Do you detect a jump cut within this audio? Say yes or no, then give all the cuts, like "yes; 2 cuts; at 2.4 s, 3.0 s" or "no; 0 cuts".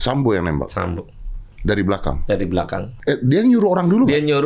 yes; 2 cuts; at 1.5 s, 2.9 s